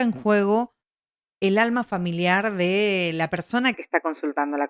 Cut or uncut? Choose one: uncut